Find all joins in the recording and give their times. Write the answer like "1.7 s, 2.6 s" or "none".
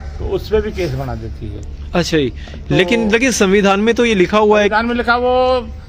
none